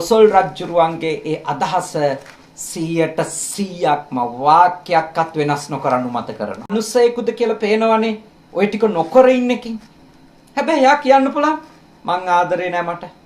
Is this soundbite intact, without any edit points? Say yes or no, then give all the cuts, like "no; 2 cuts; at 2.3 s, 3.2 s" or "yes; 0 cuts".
no; 1 cut; at 6.7 s